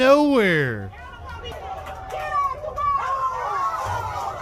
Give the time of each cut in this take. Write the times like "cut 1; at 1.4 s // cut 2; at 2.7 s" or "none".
cut 1; at 1.5 s